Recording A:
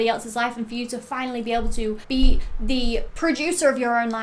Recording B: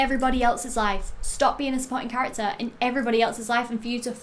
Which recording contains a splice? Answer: A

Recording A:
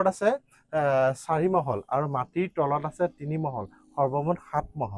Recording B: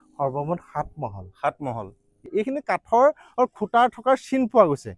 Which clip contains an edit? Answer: B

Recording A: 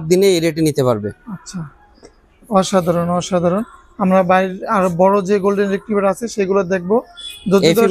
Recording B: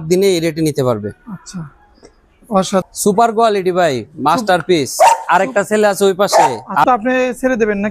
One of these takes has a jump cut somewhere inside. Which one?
B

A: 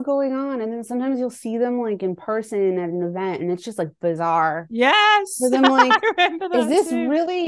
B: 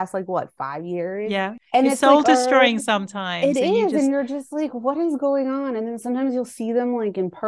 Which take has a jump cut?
B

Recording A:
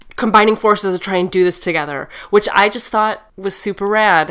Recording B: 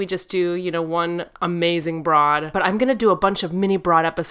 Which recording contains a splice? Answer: B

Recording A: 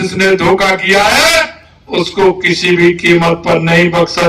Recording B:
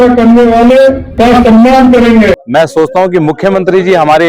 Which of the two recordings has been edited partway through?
B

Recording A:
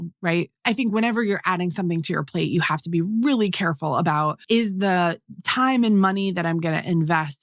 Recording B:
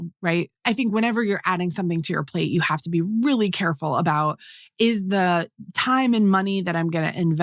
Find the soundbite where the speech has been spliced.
A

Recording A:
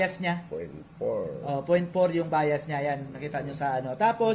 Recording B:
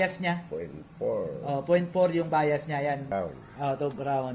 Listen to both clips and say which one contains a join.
B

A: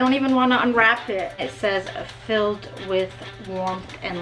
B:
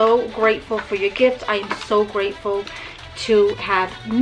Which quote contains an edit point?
A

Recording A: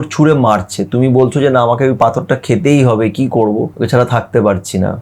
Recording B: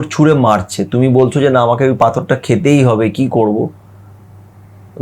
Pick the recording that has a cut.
A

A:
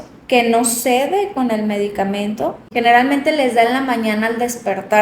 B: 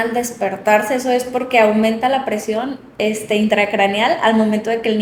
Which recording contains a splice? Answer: A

